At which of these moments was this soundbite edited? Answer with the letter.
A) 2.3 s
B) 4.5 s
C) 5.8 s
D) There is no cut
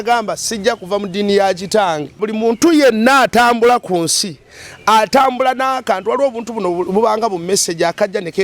A